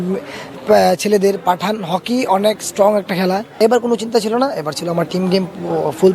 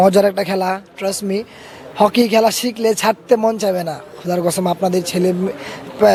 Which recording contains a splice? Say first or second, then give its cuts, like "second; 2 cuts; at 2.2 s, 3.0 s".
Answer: first; 1 cut; at 3.5 s